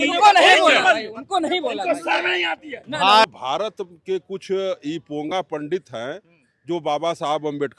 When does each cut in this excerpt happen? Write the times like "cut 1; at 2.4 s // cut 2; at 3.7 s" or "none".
cut 1; at 3.3 s